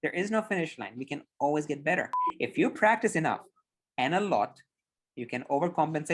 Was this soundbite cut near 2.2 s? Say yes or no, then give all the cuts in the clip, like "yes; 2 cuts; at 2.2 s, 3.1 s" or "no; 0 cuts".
yes; 1 cut; at 2.2 s